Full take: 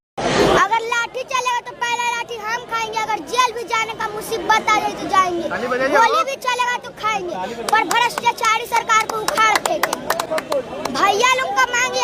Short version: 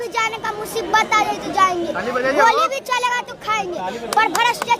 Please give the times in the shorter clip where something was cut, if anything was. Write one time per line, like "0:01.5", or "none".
none